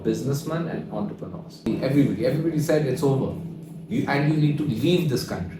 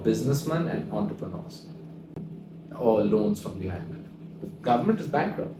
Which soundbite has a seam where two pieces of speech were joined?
first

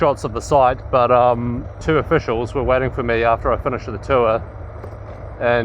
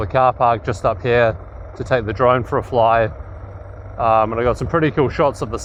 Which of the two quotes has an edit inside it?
first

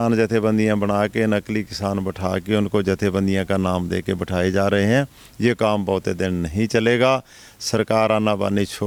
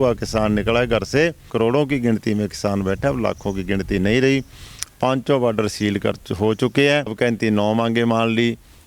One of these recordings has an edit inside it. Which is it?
second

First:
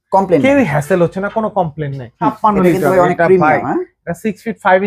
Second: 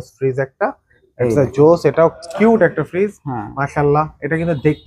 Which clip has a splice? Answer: first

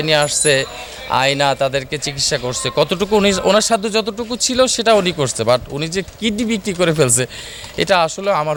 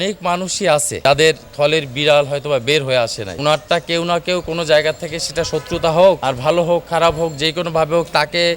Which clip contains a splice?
second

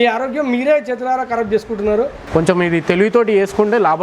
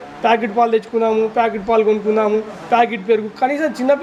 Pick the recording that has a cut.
first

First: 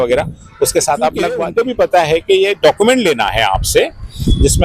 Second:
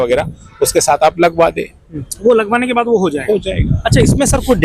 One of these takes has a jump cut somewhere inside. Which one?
first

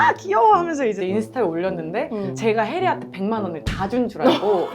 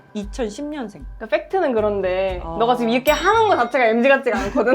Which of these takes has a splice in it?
first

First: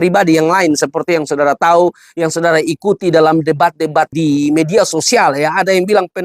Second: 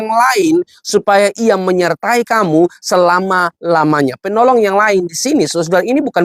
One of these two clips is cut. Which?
first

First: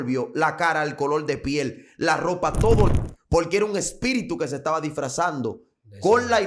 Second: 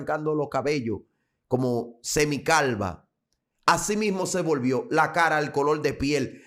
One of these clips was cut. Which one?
first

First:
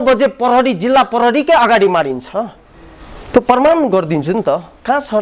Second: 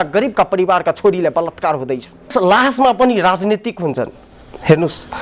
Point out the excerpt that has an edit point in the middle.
second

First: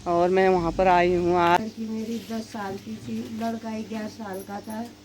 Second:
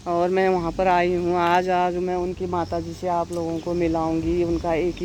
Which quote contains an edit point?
first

